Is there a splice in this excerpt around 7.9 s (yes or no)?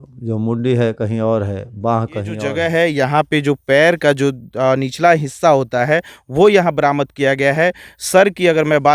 no